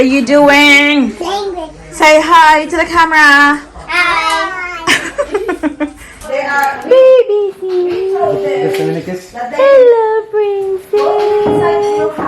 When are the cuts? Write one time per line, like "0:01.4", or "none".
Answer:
0:06.5